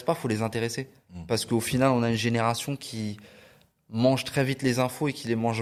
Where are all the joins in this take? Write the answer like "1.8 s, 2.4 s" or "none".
none

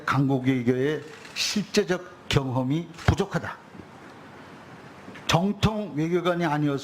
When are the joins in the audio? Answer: none

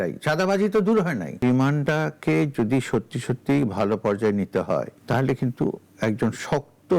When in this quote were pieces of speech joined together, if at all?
1.7 s, 4.9 s

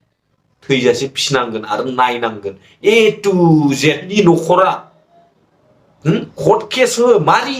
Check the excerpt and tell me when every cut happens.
4.1 s

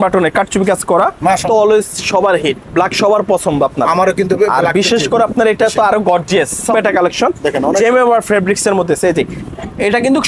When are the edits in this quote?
1.4 s, 6.7 s

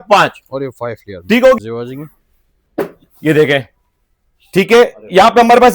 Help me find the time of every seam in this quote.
1.6 s

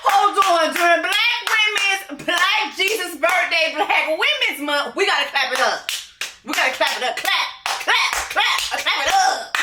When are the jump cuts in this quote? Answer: none

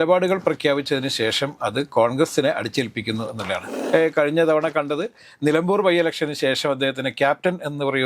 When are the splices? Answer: 3.7 s

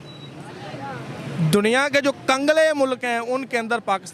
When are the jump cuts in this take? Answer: none

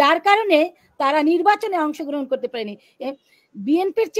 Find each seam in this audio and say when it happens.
3.0 s

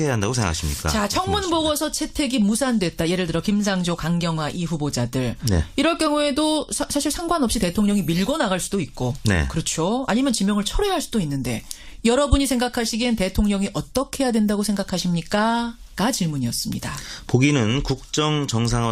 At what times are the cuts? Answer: 11.4 s

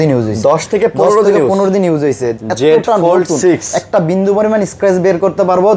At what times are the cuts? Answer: none

